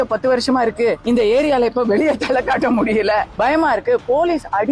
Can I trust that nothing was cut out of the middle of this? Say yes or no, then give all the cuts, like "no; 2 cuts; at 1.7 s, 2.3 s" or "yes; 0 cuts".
no; 2 cuts; at 1.0 s, 3.3 s